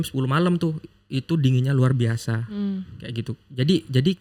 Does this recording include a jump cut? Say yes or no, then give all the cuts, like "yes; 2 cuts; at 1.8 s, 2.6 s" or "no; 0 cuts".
no; 0 cuts